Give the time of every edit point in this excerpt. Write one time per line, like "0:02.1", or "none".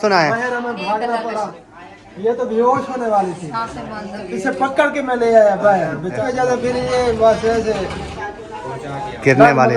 0:01.7
0:06.2